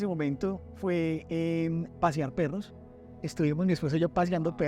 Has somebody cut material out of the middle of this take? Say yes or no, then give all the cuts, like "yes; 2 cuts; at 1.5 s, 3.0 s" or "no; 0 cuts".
no; 0 cuts